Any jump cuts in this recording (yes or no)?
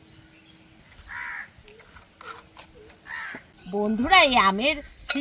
yes